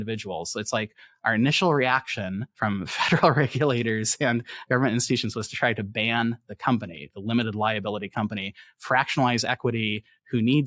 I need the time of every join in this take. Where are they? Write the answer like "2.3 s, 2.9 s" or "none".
2.4 s